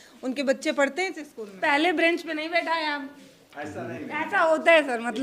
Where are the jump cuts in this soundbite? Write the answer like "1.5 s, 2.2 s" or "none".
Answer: 1.5 s

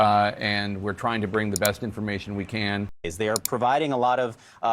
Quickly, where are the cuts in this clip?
2.9 s

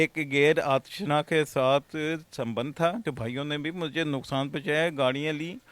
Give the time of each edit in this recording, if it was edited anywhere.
3.0 s

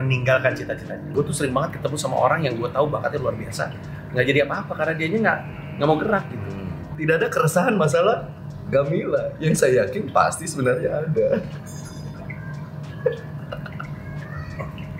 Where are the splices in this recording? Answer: 1.1 s, 6.9 s

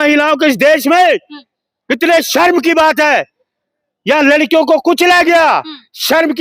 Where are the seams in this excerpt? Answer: none

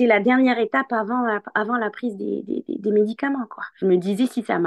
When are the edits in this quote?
none

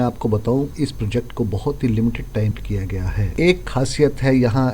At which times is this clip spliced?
2.5 s

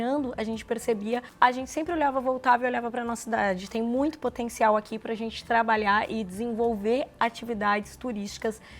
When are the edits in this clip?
1.3 s

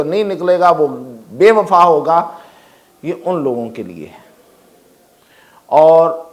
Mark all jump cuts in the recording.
none

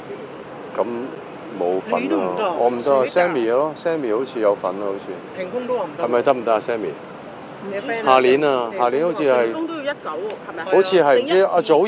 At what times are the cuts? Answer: none

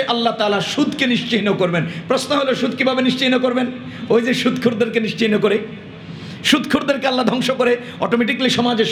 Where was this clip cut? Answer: none

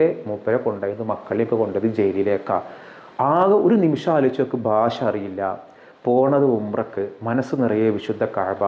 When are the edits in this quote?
none

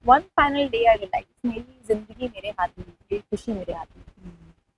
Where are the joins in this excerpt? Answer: none

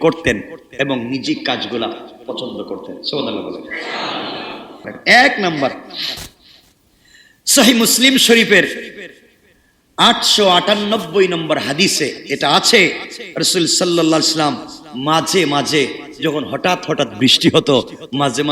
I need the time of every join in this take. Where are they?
4.9 s

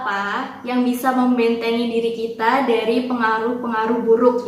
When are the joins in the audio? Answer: none

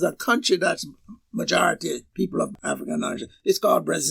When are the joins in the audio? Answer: 2.5 s

